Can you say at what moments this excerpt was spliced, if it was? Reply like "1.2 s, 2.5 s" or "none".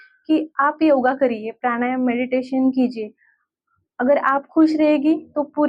none